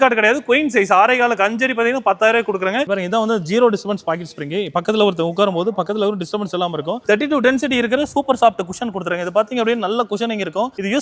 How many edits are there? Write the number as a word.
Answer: two